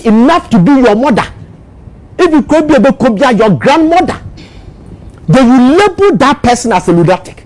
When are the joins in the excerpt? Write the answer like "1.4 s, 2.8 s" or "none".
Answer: none